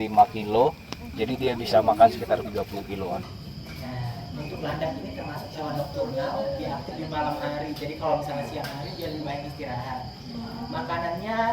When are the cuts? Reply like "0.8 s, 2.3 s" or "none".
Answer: 3.4 s